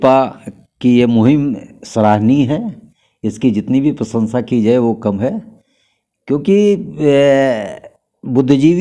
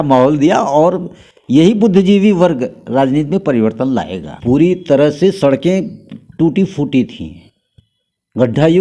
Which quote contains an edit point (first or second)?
second